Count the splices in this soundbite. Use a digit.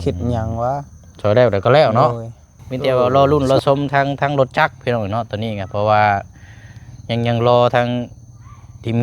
1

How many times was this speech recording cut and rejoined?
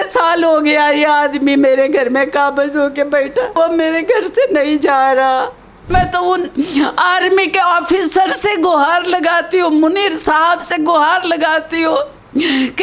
2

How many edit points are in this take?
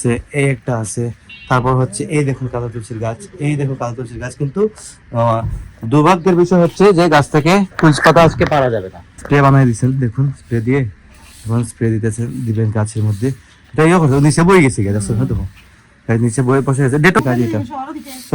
2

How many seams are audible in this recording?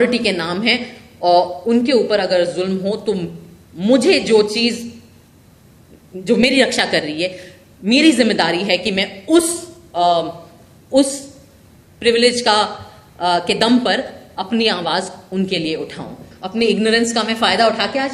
1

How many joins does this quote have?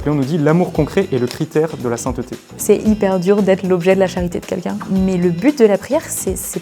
2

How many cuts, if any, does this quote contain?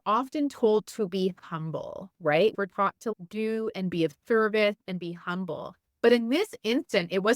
1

